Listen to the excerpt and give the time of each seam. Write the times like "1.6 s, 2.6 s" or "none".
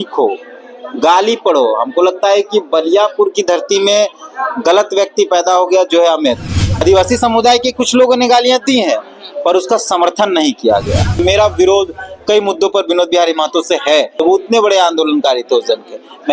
6.8 s, 11.2 s, 14.1 s